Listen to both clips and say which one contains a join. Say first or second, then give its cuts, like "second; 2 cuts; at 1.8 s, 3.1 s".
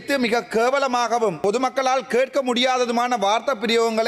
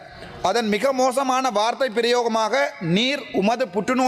first; 1 cut; at 1.4 s